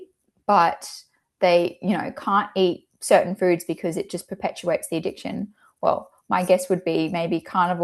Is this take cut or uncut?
uncut